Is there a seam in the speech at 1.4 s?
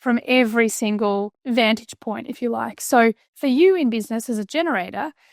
yes; 2 cuts; at 1.4 s, 3.3 s

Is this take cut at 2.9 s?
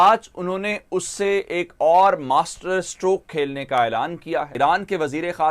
no; 1 cut; at 4.5 s

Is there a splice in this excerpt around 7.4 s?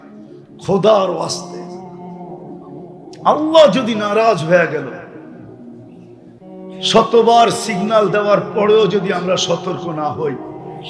no; 2 cuts; at 1.3 s, 3.2 s

